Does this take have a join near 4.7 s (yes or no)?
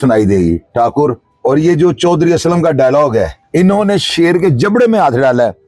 no